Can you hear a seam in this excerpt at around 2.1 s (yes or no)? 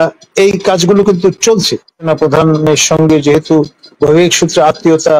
yes